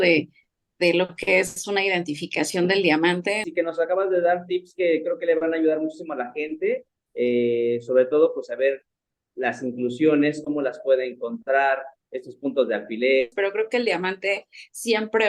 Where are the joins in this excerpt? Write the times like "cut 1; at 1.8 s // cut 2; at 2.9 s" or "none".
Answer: cut 1; at 3.4 s // cut 2; at 13.3 s